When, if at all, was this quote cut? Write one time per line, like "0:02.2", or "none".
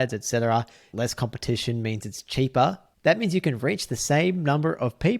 0:00.9
0:02.9